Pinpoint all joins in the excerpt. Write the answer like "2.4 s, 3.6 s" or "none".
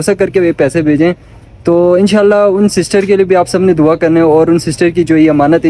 none